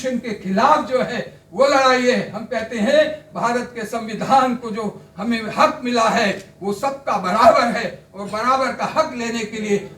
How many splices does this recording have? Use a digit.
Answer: 0